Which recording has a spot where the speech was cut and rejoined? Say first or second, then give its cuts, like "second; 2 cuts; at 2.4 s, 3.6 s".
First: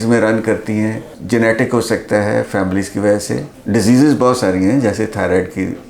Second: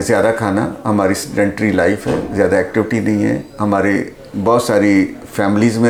first; 2 cuts; at 1.1 s, 3.5 s